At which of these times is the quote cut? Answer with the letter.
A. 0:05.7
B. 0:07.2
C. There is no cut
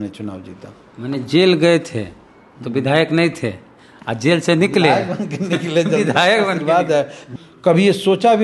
B